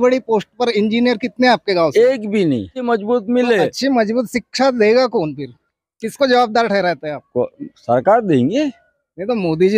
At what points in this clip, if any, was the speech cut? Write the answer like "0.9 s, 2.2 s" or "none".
2.8 s